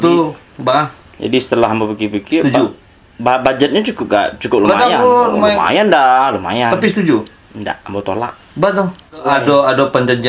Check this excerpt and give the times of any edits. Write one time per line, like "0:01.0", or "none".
0:09.3